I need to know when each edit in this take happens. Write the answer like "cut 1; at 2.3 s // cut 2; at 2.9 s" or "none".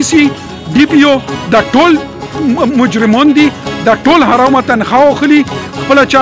none

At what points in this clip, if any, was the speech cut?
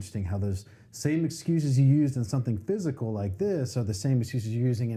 none

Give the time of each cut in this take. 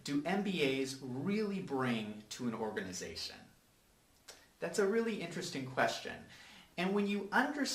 cut 1; at 2.1 s

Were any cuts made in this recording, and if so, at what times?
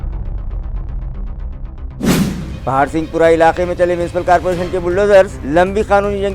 cut 1; at 2.1 s

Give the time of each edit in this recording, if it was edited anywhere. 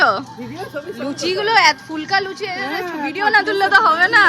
none

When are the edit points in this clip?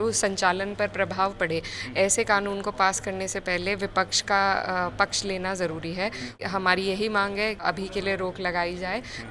cut 1; at 6.4 s // cut 2; at 7.6 s

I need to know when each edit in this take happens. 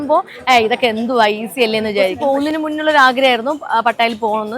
cut 1; at 2.2 s

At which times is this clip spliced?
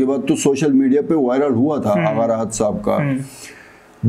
none

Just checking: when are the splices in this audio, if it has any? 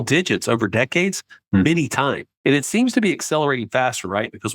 cut 1; at 2.3 s

